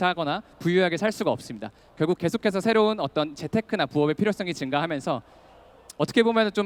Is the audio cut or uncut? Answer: uncut